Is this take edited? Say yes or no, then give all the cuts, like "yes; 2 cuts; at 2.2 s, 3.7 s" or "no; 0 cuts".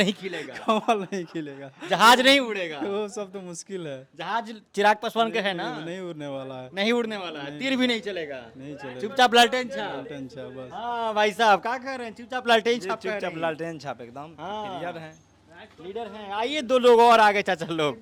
no; 0 cuts